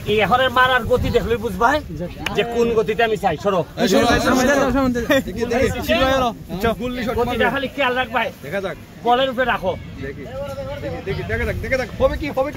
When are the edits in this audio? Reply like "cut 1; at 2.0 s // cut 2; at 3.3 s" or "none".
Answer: none